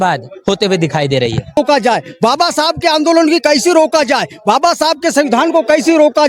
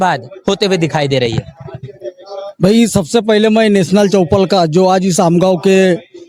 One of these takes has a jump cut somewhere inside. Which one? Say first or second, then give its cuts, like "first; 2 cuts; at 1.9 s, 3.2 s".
first; 1 cut; at 1.6 s